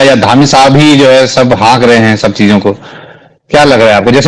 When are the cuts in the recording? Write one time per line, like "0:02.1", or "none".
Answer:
none